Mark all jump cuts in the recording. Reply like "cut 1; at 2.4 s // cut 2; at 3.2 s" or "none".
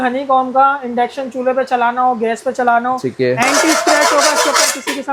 none